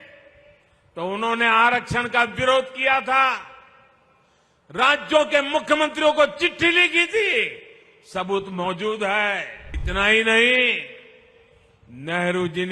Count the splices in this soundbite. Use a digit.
1